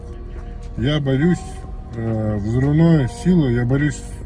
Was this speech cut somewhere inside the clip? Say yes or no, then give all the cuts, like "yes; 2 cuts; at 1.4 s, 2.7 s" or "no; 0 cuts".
no; 0 cuts